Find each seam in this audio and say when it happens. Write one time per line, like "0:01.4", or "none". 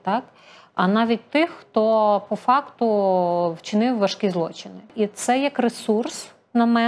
0:04.9